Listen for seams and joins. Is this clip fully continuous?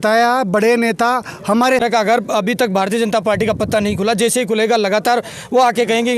no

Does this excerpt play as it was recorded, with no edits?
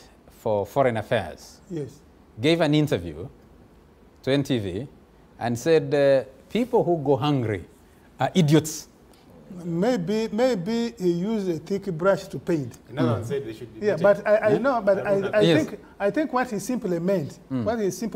yes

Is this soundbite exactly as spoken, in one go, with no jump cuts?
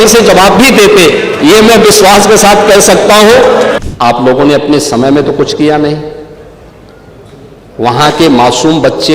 no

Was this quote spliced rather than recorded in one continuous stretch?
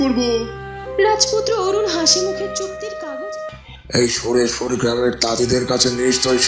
yes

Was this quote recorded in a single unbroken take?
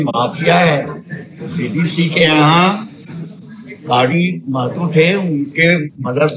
yes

